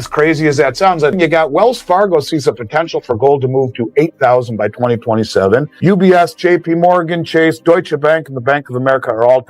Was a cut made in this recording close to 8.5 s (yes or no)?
no